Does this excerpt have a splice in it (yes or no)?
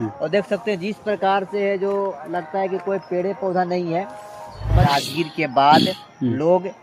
yes